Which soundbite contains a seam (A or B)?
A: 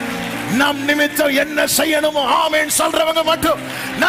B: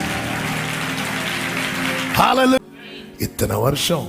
B